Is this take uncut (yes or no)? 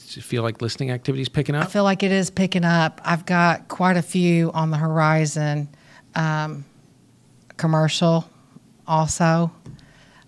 yes